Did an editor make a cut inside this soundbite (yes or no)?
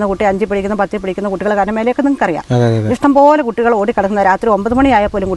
no